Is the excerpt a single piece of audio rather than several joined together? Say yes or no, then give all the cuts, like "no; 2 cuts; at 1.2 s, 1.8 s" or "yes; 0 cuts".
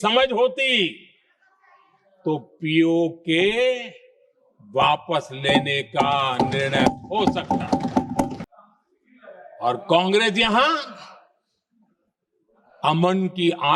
no; 1 cut; at 8.5 s